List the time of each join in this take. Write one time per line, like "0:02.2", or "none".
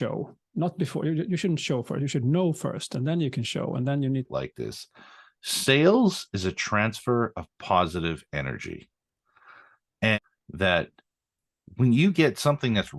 0:04.3
0:10.2